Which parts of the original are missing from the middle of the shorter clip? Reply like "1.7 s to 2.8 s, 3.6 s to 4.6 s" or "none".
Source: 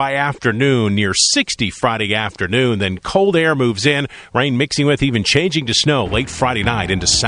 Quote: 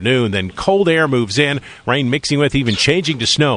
none